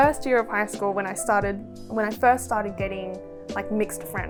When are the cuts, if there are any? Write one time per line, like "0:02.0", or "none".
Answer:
none